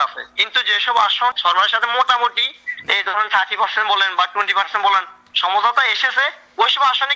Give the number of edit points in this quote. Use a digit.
1